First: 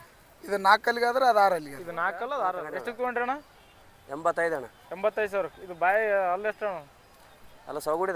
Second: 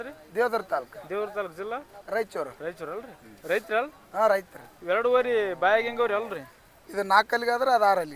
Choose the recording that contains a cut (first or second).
first